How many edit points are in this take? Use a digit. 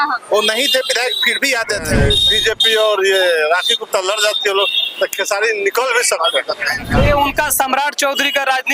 2